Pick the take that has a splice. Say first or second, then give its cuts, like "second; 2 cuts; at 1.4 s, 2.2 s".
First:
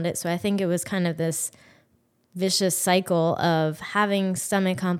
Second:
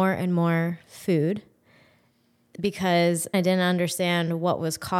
second; 1 cut; at 3.3 s